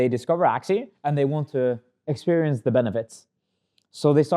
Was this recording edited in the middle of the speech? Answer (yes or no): yes